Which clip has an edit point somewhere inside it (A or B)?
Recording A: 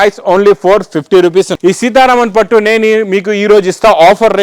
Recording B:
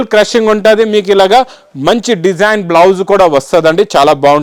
A